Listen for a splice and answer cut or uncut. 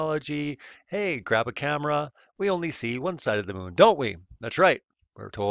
uncut